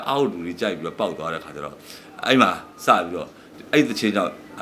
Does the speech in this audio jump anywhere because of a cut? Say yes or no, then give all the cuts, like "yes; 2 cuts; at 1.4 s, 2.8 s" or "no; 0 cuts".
no; 0 cuts